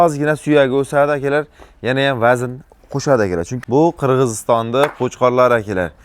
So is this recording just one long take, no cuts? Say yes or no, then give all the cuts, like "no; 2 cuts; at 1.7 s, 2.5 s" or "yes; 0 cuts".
no; 1 cut; at 3.5 s